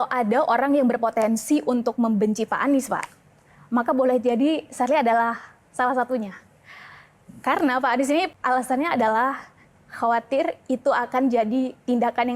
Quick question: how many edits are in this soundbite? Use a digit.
1